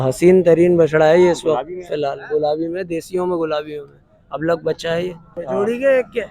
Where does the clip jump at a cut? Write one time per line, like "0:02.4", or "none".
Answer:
0:05.4